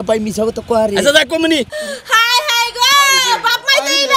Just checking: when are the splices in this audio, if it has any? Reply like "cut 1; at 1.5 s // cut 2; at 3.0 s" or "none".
cut 1; at 1.6 s